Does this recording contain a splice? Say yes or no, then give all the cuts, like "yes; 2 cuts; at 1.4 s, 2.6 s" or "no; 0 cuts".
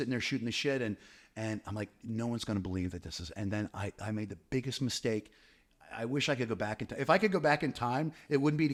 no; 0 cuts